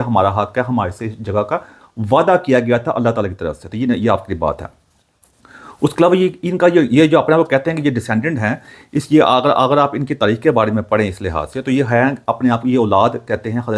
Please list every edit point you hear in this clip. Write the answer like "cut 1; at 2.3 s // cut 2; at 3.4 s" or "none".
none